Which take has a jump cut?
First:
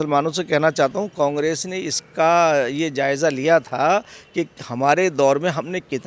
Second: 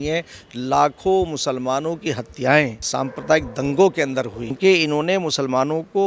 second; 2 cuts; at 2.8 s, 4.5 s

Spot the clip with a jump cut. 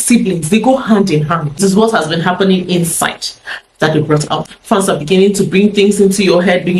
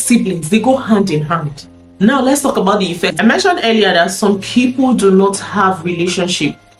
first; 2 cuts; at 1.5 s, 4.5 s

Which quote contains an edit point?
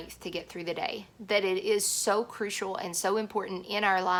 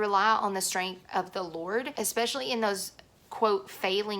second; 1 cut; at 1.9 s

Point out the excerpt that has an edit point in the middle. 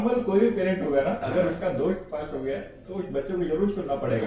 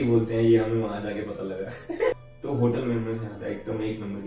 second; 1 cut; at 2.1 s

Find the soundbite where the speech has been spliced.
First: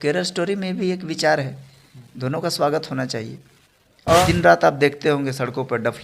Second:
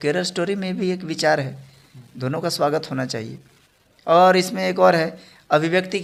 first; 1 cut; at 4.2 s

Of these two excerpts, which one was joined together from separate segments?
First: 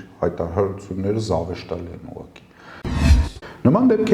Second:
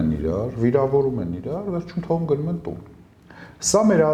first; 1 cut; at 3.0 s

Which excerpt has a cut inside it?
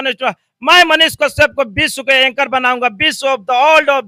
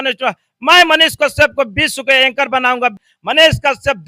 second; 1 cut; at 3.1 s

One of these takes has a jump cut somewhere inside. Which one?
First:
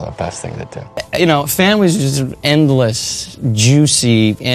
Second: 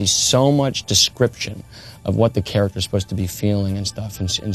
first; 1 cut; at 1.1 s

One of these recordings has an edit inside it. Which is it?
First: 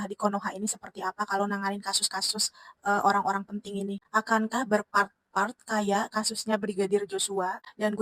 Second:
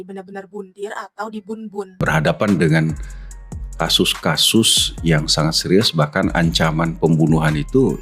second; 1 cut; at 2.0 s

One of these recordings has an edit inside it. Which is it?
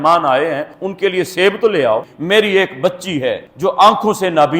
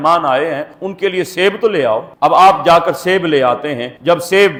first; 1 cut; at 2.1 s

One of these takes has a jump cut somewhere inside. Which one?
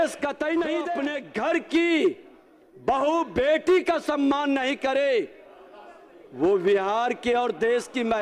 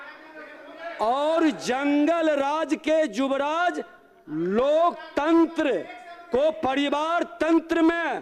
first; 1 cut; at 0.9 s

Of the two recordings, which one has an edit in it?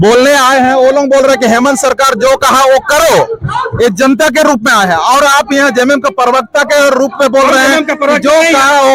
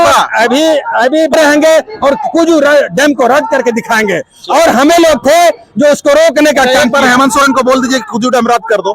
second; 1 cut; at 1.3 s

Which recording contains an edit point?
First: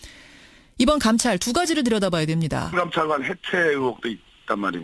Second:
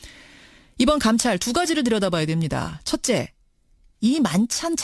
second; 1 cut; at 2.7 s

